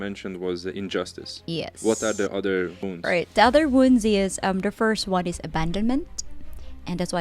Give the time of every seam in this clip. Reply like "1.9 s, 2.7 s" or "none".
2.9 s